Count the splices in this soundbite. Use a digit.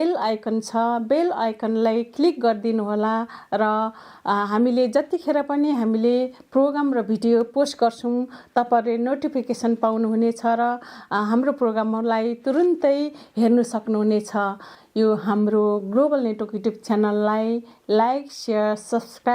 1